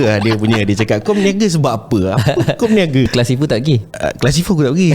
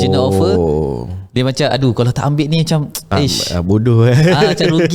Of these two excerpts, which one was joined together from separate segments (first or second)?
first